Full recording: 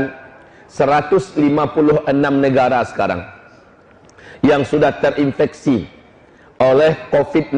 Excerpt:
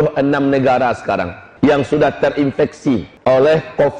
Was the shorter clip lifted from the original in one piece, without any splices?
no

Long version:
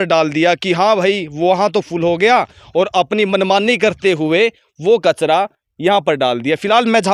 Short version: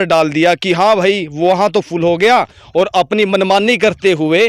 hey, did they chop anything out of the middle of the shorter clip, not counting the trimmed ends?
no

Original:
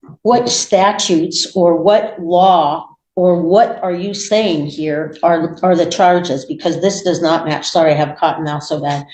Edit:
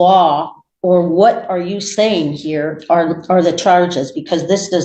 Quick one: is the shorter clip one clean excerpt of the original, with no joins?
yes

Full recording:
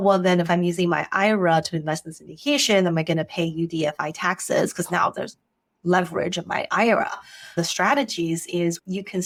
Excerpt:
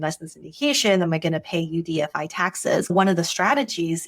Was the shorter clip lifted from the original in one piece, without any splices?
no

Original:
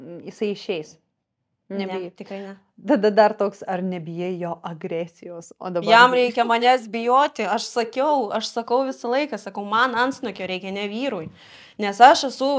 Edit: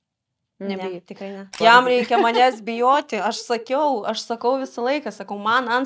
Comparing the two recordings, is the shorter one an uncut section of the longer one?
no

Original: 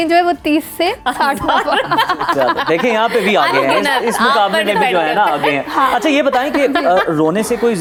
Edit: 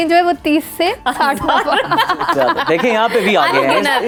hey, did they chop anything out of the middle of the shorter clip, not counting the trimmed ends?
no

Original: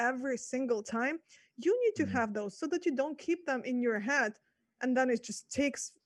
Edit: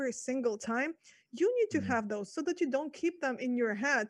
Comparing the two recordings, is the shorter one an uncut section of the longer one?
yes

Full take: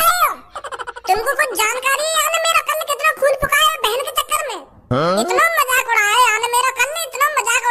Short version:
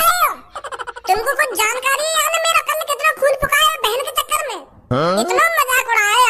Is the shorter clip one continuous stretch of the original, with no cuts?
yes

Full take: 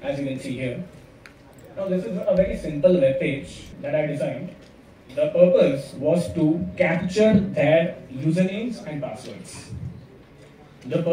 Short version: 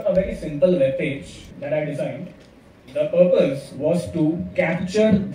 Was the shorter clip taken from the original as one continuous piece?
yes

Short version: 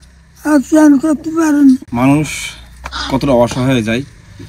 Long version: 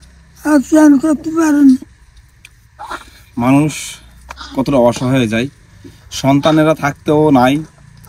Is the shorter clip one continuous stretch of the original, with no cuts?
no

